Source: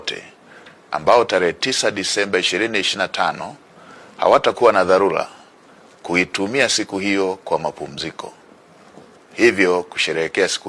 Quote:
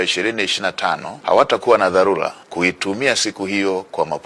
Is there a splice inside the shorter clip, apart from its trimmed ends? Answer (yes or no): yes